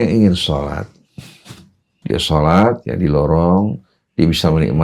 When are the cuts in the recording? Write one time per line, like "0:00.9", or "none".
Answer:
0:01.4